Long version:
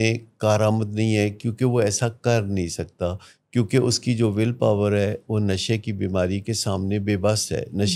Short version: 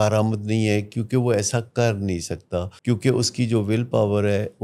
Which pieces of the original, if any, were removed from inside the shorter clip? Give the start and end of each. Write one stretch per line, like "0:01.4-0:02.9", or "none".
0:03.2-0:03.4

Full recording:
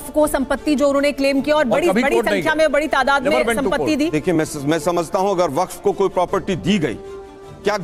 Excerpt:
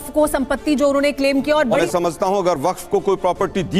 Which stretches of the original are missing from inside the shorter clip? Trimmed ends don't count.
0:01.8-0:04.8

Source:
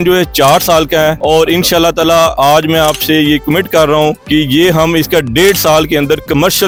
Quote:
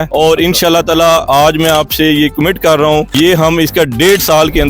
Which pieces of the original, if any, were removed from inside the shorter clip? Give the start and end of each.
0:04.2-0:04.5

